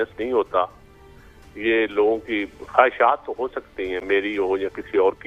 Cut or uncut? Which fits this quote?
uncut